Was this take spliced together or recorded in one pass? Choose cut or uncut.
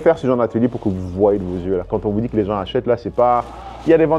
uncut